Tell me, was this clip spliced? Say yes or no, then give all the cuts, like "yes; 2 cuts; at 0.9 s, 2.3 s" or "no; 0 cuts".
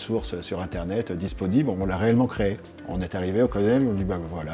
yes; 1 cut; at 2.7 s